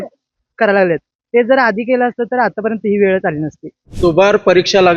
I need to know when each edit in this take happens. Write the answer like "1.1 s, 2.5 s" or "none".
3.8 s